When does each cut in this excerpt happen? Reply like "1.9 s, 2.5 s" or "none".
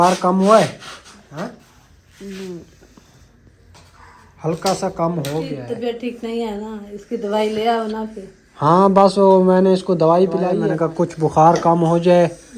1.1 s, 5.6 s, 10.5 s